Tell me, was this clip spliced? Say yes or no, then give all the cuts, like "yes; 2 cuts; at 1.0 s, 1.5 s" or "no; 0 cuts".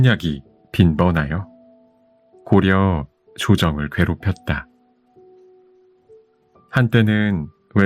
yes; 2 cuts; at 4.6 s, 6.7 s